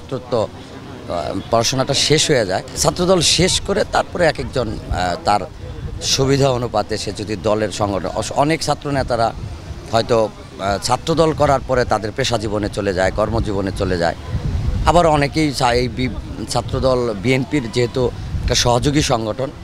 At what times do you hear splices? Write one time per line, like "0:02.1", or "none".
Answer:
none